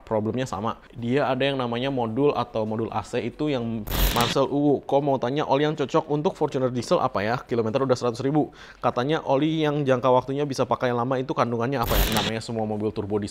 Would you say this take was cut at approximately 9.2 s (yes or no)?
no